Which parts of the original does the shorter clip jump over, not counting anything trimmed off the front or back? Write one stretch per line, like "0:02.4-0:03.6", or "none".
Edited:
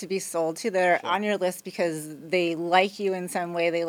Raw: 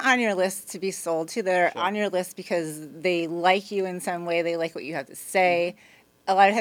none